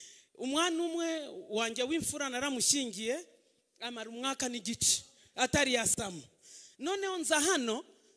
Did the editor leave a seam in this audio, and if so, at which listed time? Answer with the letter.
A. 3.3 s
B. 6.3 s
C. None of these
C